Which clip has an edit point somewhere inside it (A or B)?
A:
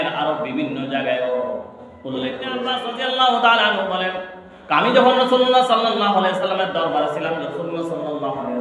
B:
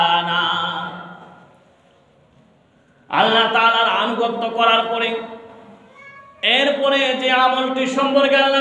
A